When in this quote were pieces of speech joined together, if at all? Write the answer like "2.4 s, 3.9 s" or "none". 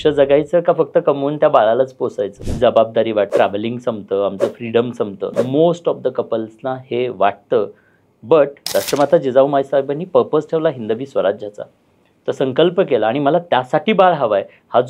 2.4 s, 3.3 s, 5.3 s, 8.6 s